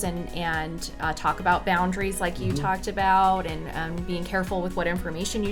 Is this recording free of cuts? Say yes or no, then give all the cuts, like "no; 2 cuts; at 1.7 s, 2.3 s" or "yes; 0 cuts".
yes; 0 cuts